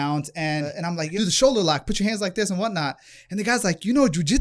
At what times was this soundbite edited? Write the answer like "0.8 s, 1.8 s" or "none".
0.9 s